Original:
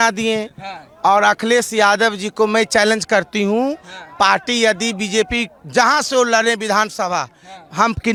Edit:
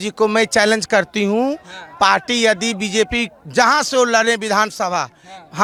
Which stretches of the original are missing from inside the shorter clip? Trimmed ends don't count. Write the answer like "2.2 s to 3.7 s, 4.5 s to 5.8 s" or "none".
none